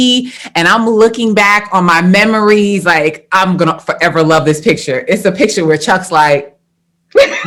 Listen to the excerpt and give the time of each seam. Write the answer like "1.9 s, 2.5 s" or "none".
none